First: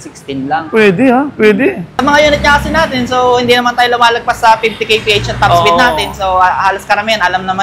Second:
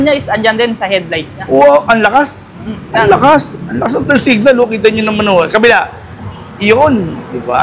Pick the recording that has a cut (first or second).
first